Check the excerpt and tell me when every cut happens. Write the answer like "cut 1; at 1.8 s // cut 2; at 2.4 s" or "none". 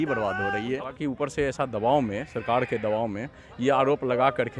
cut 1; at 0.9 s